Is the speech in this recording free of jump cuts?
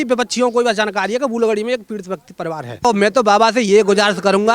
no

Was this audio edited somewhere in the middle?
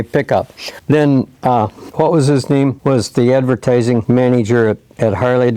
yes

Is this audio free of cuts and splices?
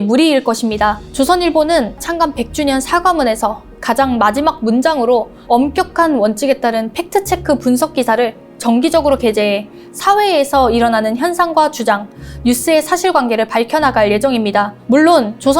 no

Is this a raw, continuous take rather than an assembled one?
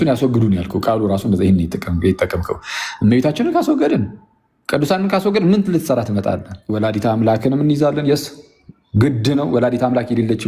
no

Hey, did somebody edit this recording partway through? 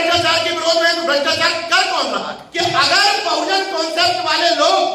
yes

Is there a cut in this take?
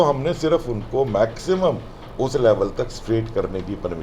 no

